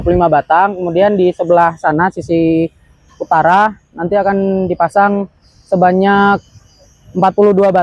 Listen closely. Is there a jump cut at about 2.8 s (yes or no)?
no